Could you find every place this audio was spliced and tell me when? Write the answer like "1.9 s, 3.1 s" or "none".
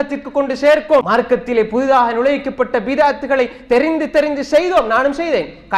1.1 s